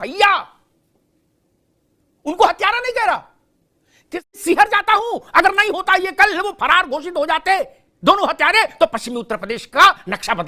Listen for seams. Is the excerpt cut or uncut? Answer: cut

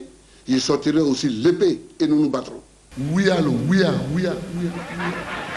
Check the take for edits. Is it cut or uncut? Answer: cut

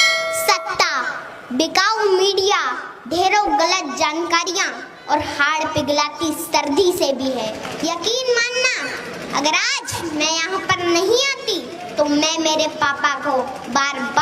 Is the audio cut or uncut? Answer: cut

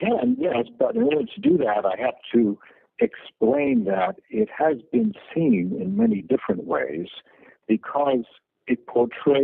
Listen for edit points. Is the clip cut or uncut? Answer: uncut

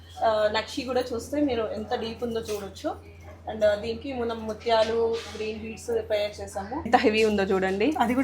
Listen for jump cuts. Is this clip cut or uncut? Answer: cut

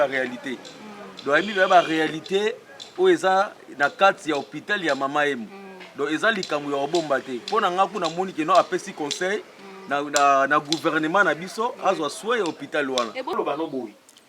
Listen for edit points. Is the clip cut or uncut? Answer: cut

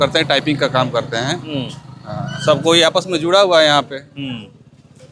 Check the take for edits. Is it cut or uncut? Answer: uncut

